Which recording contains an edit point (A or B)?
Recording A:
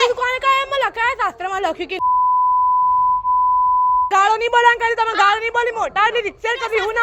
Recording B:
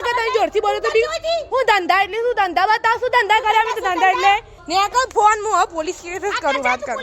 B